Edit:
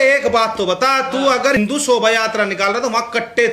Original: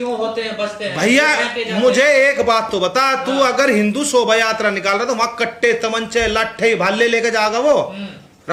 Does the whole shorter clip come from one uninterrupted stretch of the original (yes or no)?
no